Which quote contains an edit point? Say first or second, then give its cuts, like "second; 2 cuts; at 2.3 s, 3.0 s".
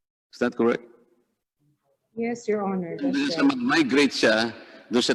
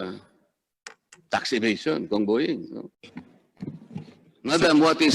second; 1 cut; at 3.0 s